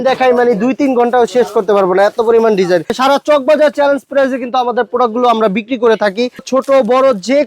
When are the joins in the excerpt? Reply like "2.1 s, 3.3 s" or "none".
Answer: 3.0 s, 6.5 s

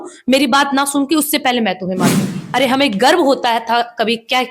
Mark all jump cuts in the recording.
2.4 s

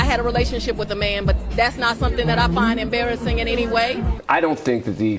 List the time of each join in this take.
4.2 s

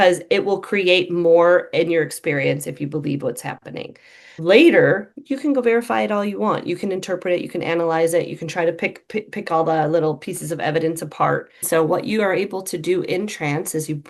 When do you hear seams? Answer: 4.2 s, 11.6 s

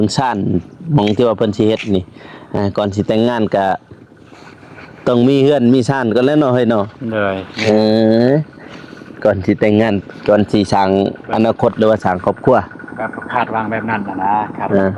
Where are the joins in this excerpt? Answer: none

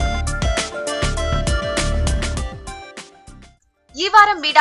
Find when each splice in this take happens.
3.4 s

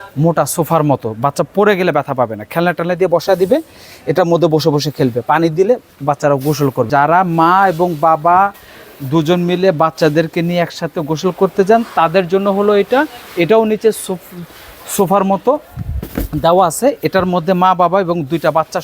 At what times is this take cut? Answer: 6.9 s

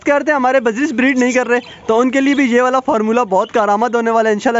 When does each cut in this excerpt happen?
none

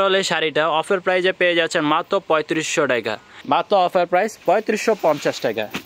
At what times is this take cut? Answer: 3.3 s

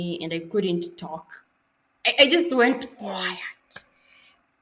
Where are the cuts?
none

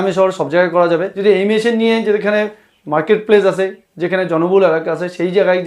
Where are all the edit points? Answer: 1.1 s

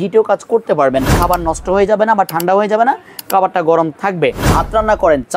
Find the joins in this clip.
1.2 s, 4.4 s

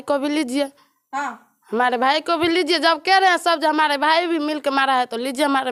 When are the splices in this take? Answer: none

